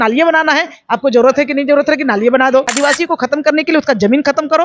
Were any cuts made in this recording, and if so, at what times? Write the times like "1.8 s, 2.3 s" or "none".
2.7 s